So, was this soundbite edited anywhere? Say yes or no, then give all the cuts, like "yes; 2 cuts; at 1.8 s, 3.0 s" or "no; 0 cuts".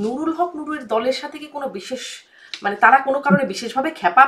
no; 0 cuts